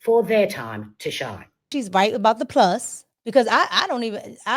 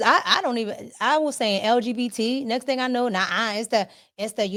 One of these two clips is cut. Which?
first; 1 cut; at 1.7 s

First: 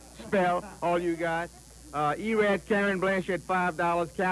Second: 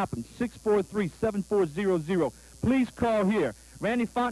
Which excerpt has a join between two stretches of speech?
first; 1 cut; at 2.1 s

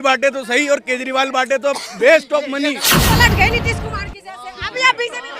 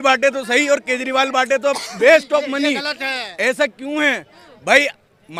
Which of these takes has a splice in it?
first; 1 cut; at 2.9 s

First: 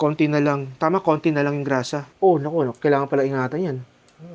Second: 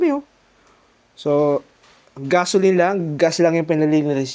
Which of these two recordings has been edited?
first; 1 cut; at 2.0 s

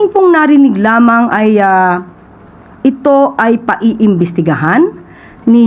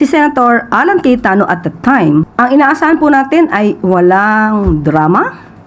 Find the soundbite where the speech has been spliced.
second; 1 cut; at 2.3 s

